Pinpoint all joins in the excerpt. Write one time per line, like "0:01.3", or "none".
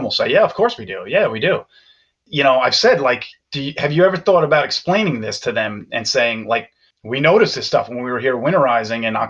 0:02.2